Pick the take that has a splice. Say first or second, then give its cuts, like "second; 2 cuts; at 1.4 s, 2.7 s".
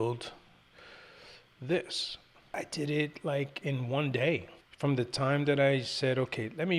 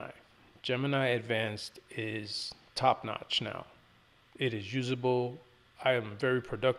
first; 2 cuts; at 2.6 s, 4.6 s